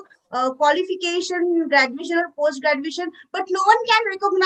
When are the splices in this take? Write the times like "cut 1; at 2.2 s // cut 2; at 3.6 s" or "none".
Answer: none